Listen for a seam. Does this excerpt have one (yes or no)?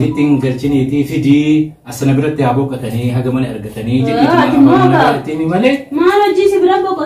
no